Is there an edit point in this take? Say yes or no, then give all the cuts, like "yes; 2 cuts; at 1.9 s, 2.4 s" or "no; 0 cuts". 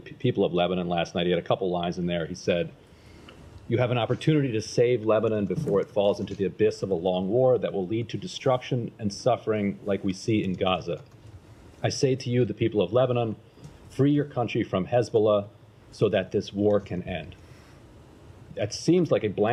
no; 0 cuts